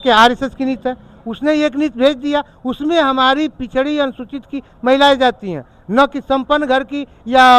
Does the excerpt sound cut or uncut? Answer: uncut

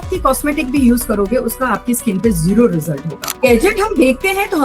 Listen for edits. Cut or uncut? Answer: cut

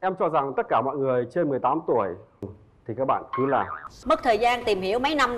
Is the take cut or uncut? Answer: cut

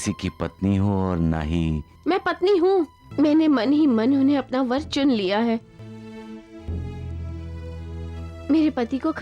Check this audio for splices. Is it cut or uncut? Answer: cut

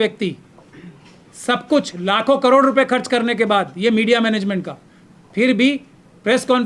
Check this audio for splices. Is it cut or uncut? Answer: uncut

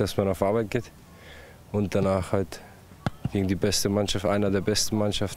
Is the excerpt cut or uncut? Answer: uncut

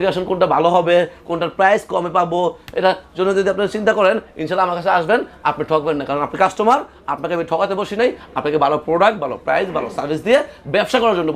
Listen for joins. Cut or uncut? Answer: uncut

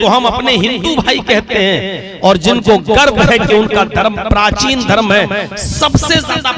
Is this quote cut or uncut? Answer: uncut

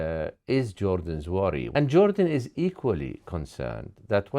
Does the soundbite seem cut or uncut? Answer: cut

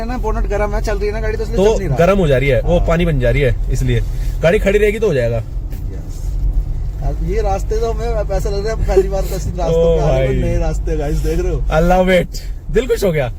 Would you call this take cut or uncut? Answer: uncut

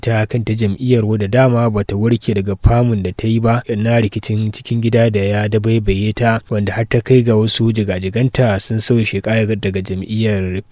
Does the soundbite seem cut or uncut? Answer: cut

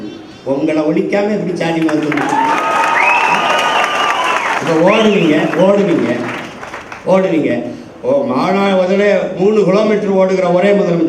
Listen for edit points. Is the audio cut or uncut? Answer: cut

